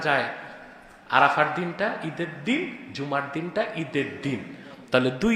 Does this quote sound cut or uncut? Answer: uncut